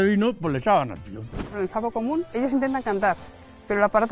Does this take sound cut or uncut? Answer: cut